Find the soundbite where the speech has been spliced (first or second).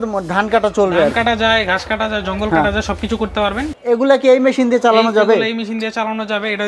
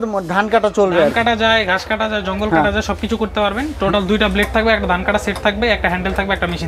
first